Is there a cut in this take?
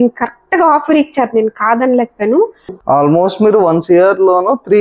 yes; 1 cut; at 2.8 s

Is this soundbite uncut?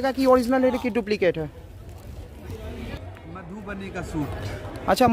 no; 1 cut; at 3.0 s

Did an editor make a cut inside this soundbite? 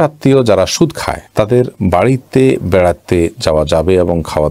no; 0 cuts

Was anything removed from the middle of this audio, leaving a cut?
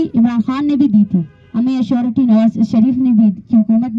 no; 0 cuts

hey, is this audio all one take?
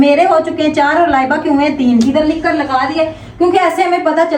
yes; 0 cuts

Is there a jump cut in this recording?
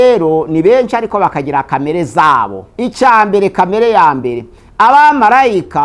yes; 1 cut; at 2.6 s

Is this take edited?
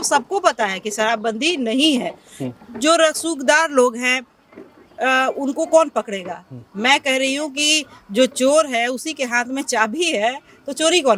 no; 0 cuts

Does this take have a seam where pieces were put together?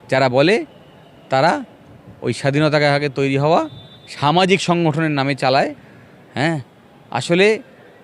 no; 0 cuts

